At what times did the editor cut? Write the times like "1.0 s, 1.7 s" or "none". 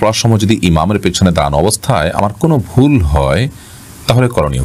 none

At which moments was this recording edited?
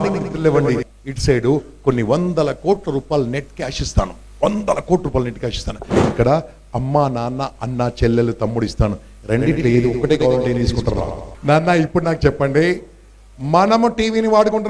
0.9 s, 11.2 s

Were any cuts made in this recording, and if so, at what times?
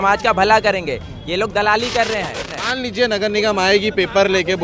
2.6 s

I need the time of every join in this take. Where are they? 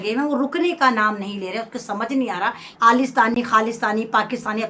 2.6 s

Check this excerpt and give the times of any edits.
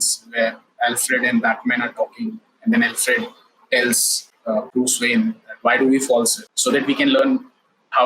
6.5 s

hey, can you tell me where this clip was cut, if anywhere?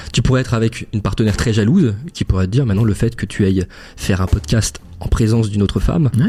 none

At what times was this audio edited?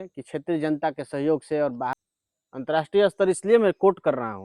1.9 s

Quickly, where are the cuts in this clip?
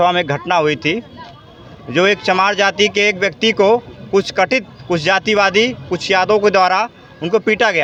none

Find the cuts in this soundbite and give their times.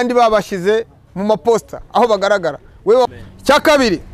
3.1 s

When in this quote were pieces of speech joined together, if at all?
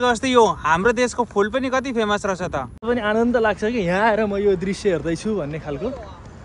2.8 s

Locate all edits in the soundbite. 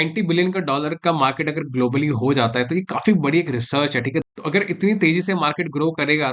4.2 s

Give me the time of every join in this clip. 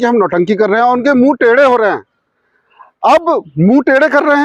none

